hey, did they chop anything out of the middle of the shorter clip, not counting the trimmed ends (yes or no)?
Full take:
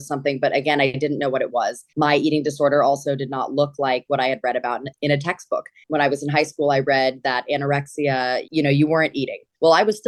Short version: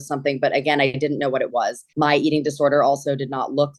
no